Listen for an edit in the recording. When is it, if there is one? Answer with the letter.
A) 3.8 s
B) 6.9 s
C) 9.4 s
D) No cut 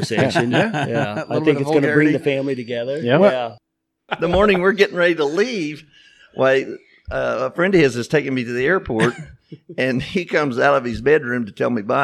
A